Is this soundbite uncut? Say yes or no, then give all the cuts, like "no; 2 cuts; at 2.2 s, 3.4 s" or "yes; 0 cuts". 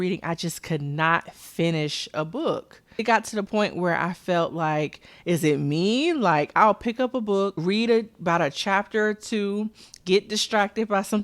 no; 2 cuts; at 3.0 s, 7.6 s